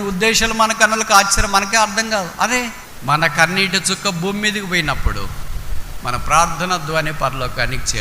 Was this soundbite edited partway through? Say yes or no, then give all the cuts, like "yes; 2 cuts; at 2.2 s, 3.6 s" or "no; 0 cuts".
yes; 1 cut; at 2.8 s